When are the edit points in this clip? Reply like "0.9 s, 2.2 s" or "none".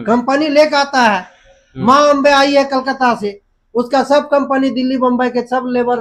none